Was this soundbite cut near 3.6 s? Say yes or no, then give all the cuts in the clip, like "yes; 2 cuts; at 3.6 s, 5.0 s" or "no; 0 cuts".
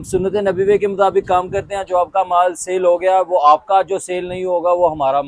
no; 0 cuts